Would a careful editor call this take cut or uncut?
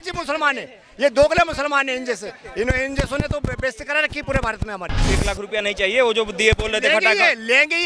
cut